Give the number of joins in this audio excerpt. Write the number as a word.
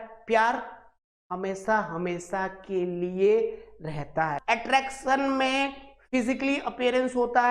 one